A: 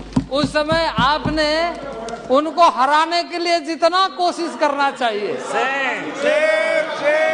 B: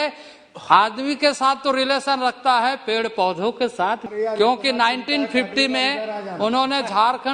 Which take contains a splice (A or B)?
B